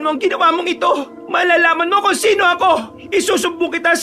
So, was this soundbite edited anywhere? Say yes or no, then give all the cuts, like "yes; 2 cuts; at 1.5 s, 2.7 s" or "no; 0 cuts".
yes; 2 cuts; at 1.2 s, 2.9 s